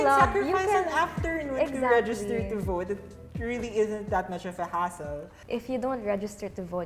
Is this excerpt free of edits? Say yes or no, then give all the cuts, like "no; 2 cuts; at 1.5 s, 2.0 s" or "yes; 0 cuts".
no; 1 cut; at 5.3 s